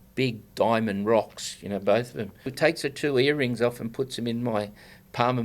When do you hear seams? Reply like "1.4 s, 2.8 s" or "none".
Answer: 2.5 s